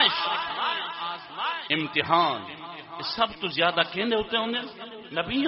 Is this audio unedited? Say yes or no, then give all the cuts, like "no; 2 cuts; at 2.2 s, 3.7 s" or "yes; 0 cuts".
yes; 0 cuts